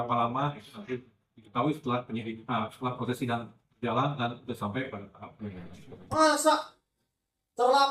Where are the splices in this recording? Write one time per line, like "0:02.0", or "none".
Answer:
0:06.1